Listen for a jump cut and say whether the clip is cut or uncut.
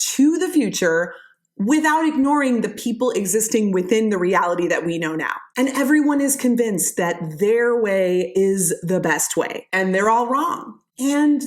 cut